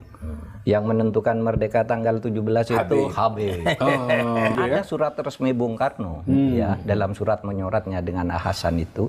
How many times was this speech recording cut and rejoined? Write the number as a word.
one